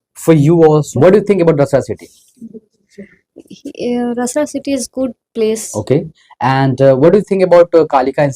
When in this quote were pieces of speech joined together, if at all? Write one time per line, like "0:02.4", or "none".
0:00.9